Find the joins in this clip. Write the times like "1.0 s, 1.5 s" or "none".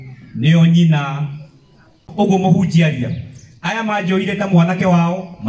2.0 s